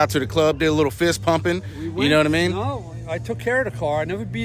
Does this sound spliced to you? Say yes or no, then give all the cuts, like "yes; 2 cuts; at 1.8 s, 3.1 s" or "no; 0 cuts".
no; 0 cuts